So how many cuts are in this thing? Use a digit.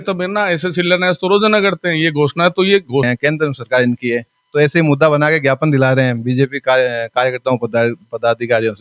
1